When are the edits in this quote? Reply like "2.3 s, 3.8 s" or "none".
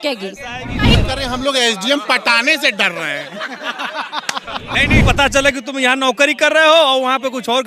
1.0 s, 5.0 s